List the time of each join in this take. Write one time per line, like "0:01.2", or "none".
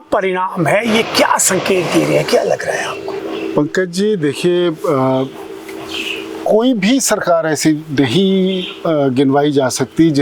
none